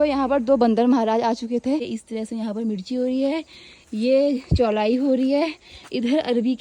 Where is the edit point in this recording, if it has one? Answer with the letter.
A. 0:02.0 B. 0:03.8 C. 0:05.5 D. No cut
A